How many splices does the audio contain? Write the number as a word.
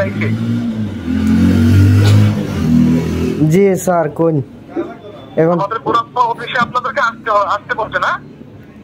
zero